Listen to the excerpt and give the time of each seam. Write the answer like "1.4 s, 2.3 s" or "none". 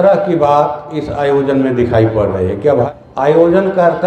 2.9 s

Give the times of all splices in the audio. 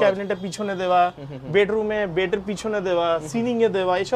none

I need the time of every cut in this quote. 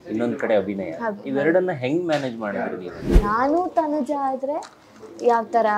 3.1 s

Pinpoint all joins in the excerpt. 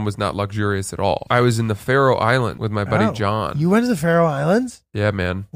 1.2 s, 2.6 s

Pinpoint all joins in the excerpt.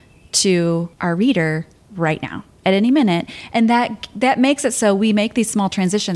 0.9 s

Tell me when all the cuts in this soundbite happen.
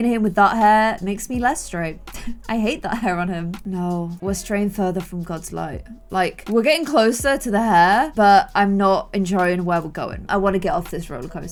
none

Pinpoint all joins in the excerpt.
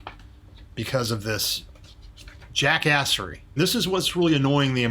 3.6 s

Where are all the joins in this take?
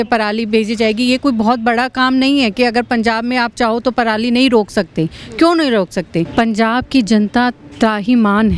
6.3 s

